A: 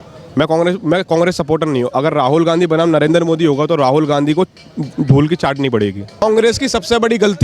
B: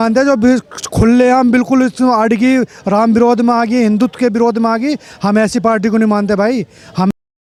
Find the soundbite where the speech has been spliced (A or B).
A